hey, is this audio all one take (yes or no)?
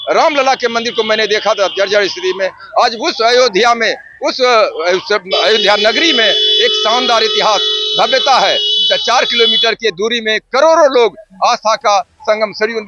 yes